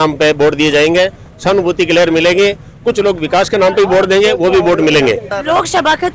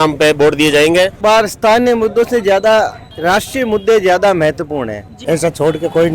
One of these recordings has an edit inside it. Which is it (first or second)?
second